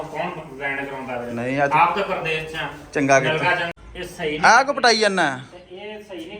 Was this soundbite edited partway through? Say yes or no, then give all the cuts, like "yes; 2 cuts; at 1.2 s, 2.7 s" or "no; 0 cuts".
yes; 1 cut; at 3.7 s